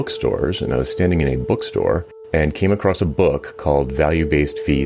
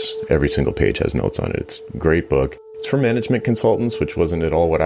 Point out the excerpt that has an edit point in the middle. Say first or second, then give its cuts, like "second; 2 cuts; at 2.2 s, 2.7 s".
first; 1 cut; at 2.1 s